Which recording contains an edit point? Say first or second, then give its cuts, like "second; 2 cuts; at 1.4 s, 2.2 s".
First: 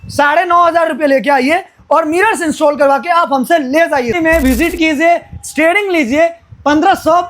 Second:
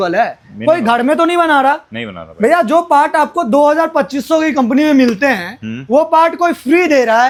first; 1 cut; at 4.2 s